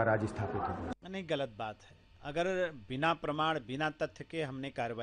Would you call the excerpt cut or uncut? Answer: uncut